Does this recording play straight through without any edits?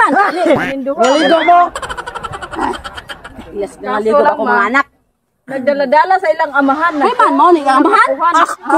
yes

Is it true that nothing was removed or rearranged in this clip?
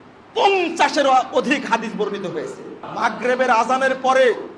no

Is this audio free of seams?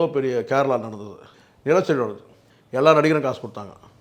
yes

